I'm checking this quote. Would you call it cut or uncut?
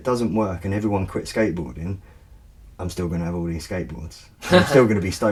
uncut